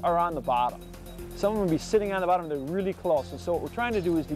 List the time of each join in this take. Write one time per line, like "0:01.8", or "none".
none

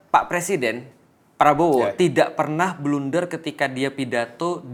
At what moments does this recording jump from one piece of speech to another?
none

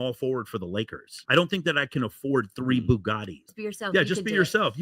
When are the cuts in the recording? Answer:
0:03.4

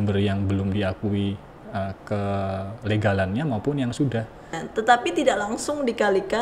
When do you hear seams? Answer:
0:04.6

